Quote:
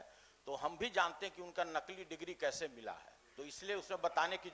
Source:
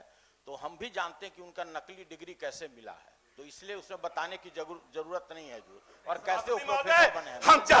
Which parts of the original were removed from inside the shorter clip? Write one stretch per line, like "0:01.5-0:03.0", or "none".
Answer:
none

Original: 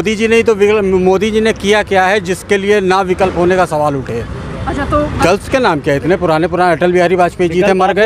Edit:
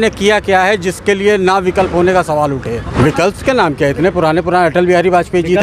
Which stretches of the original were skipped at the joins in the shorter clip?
0:04.5-0:05.2

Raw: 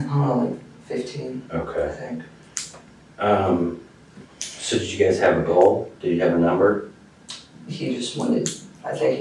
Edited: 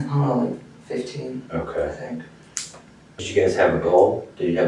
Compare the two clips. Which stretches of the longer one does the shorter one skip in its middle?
0:03.2-0:04.8

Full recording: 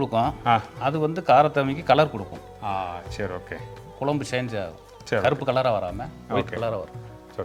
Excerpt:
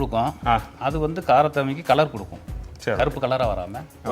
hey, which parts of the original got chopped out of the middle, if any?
0:02.5-0:04.7

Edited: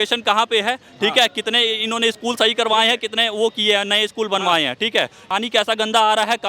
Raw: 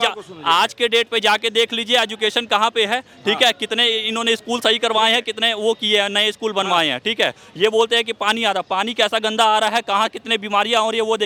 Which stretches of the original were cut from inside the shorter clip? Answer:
0:07.5-0:08.7

